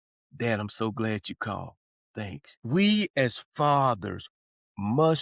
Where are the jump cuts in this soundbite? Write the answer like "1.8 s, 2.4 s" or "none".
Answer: 2.5 s